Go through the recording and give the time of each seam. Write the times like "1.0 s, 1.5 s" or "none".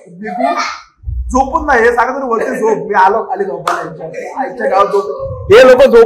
none

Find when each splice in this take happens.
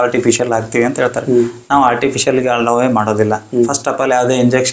none

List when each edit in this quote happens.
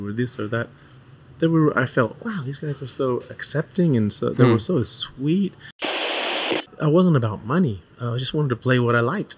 6.1 s

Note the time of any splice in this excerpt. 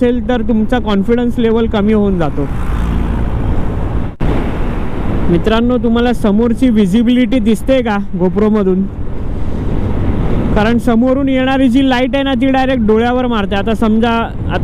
none

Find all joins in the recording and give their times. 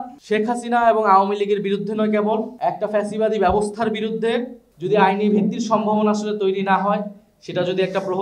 4.6 s

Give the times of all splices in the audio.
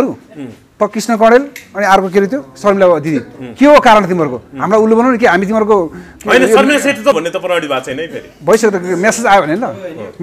7.1 s

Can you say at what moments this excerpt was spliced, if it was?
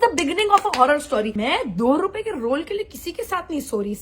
1.3 s

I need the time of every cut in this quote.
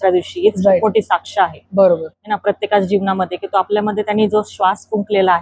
none

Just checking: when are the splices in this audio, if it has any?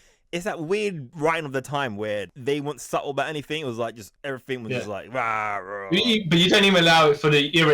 1.1 s, 2.3 s, 4.1 s

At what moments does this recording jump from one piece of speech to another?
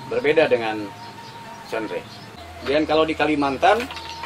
2.4 s

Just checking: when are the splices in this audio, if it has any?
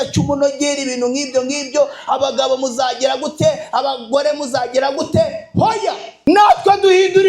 6.1 s

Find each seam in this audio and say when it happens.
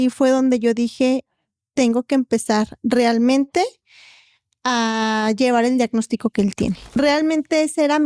7.0 s

